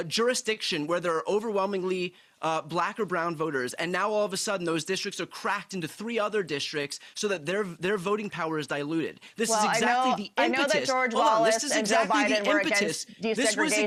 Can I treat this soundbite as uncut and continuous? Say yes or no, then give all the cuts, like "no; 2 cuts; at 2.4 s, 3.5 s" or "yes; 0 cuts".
yes; 0 cuts